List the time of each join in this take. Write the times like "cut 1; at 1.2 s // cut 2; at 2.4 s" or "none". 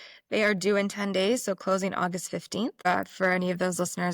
cut 1; at 2.9 s